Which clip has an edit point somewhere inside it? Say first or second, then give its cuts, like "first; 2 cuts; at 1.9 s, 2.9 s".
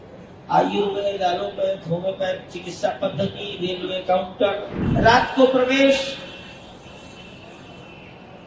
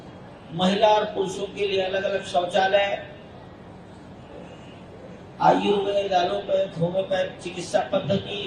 first; 1 cut; at 4.8 s